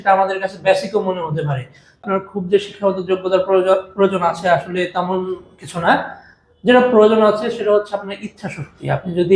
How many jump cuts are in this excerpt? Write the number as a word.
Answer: one